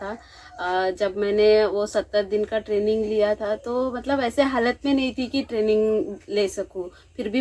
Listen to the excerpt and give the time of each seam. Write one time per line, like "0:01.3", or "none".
0:04.2